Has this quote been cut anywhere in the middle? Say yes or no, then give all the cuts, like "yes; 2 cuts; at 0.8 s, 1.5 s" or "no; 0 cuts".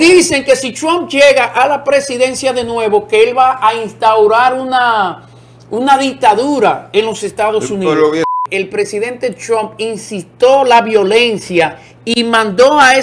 yes; 1 cut; at 8.3 s